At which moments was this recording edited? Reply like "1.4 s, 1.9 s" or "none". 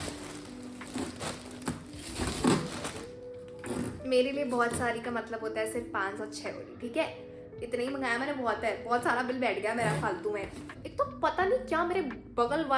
10.7 s